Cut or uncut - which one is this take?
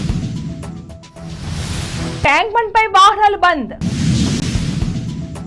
cut